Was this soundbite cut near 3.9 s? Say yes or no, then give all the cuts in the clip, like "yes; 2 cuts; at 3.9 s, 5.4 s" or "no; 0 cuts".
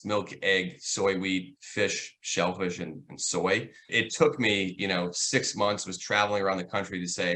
yes; 1 cut; at 3.9 s